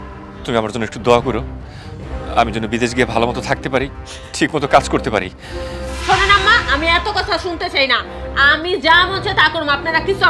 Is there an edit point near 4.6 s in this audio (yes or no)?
no